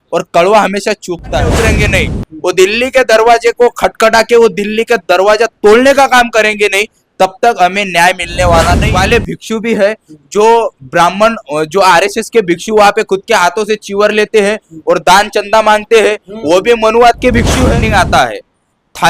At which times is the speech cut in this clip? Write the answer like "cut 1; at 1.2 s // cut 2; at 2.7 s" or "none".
cut 1; at 1.5 s // cut 2; at 8.9 s // cut 3; at 17.8 s